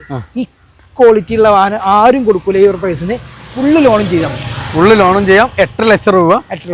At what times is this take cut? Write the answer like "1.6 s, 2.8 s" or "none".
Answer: none